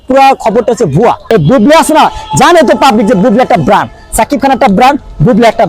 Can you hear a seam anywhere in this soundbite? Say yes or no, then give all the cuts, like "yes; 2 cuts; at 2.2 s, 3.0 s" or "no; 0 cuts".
yes; 1 cut; at 1.2 s